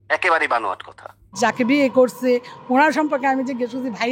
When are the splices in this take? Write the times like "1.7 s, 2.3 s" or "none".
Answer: 1.3 s